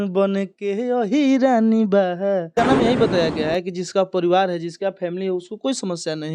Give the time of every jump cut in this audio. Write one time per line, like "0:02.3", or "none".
0:02.5